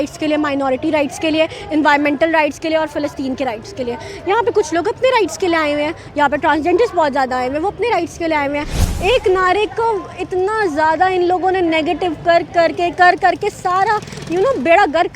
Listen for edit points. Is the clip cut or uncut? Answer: cut